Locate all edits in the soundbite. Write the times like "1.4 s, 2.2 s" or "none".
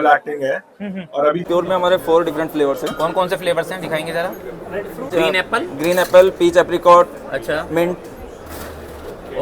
1.4 s, 5.1 s

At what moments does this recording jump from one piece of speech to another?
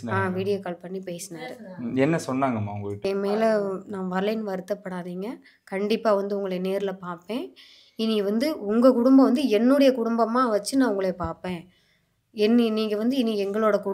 3.0 s

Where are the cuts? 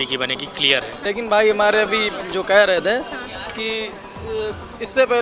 1.0 s

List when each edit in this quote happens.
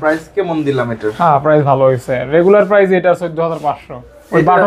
none

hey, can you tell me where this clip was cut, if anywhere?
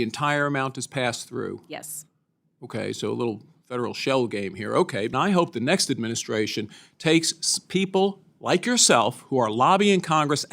5.1 s

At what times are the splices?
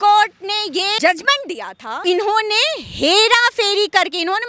1.0 s, 1.9 s

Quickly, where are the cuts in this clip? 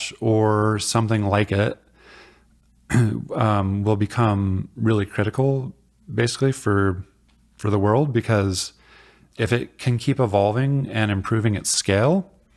9.2 s

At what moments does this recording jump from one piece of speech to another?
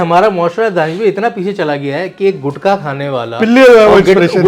none

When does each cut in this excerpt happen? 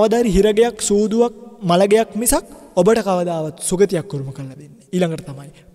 1.5 s, 2.6 s

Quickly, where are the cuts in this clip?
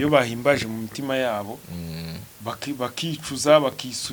none

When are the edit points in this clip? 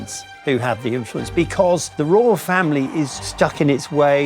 1.9 s, 3.3 s

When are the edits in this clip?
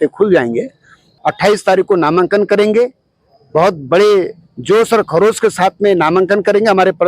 1.0 s

